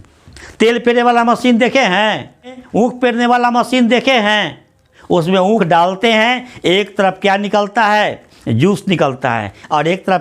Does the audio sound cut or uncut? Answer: cut